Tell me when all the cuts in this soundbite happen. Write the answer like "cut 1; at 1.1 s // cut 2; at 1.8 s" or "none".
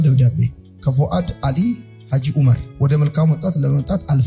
cut 1; at 2.7 s

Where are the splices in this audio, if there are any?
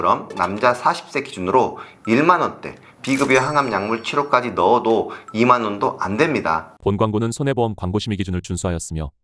cut 1; at 6.7 s

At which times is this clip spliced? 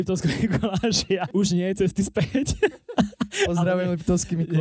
cut 1; at 1.3 s

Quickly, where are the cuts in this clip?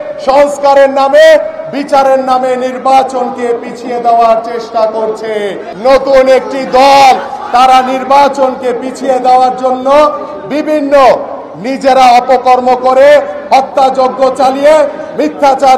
cut 1; at 5.6 s

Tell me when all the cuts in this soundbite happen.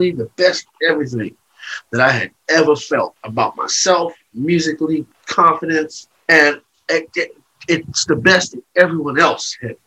cut 1; at 3.2 s // cut 2; at 5.2 s // cut 3; at 6.1 s

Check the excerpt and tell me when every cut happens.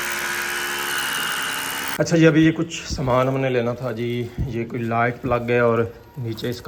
none

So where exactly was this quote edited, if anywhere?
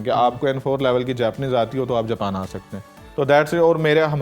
none

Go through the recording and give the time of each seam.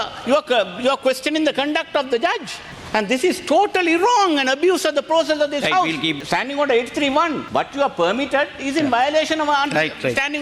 cut 1; at 6.2 s // cut 2; at 7.4 s

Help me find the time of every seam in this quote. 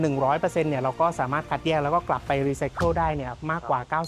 none

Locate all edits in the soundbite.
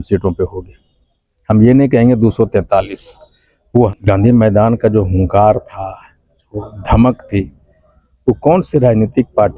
cut 1; at 3.9 s

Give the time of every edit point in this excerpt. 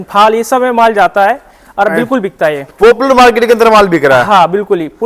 none

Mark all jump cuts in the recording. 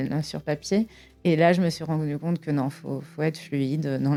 none

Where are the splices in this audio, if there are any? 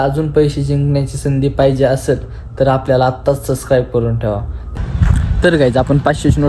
cut 1; at 4.6 s

